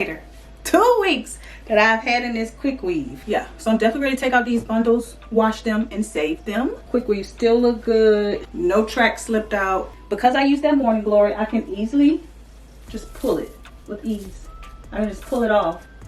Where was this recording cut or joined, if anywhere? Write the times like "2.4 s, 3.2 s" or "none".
3.2 s, 6.8 s, 8.5 s, 9.9 s, 13.7 s